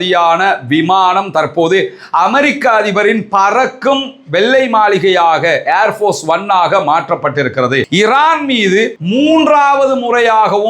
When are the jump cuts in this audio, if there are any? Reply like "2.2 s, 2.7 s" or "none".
7.9 s